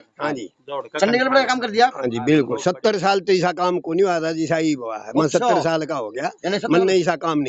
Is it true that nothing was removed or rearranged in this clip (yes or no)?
yes